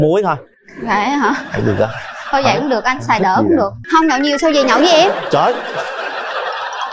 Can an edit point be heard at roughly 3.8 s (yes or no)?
yes